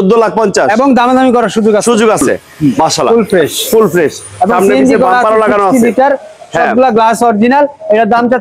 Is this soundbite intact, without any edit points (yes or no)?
no